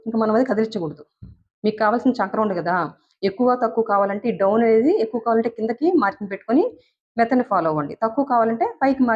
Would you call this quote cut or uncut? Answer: uncut